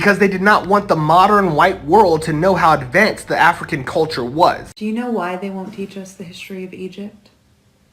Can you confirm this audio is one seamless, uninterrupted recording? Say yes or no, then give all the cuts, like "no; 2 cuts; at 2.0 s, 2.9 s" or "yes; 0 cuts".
no; 1 cut; at 4.7 s